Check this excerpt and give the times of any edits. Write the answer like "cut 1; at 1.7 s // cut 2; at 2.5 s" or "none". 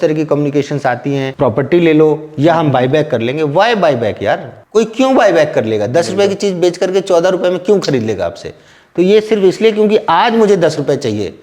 cut 1; at 1.3 s // cut 2; at 4.5 s